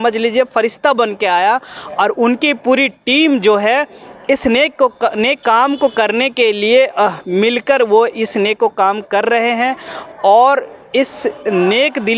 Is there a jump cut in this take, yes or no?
no